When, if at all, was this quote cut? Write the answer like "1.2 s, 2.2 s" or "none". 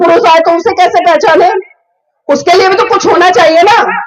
none